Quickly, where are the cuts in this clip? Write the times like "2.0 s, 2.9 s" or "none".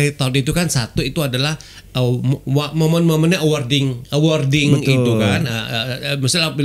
none